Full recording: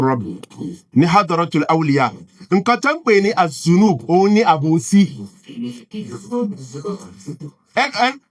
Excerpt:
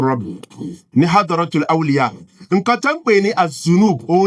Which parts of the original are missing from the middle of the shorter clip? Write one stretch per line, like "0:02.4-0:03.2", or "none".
none